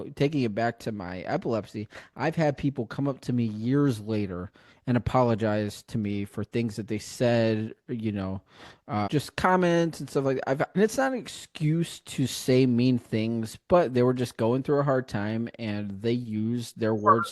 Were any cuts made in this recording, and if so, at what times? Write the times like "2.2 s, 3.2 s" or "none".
9.1 s, 10.8 s